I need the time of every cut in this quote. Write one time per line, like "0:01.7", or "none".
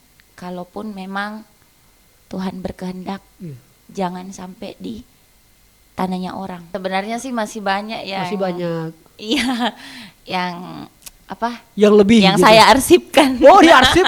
0:06.6